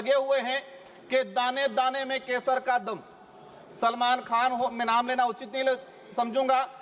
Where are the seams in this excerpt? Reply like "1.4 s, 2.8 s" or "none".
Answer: none